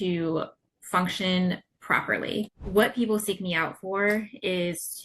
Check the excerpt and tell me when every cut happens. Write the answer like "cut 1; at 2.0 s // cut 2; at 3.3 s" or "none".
cut 1; at 2.5 s